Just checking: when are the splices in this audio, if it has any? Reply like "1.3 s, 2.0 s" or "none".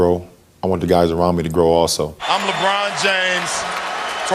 2.2 s